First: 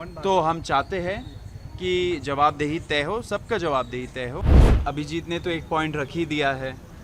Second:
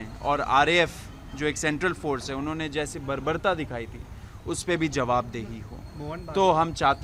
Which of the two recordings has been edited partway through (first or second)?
first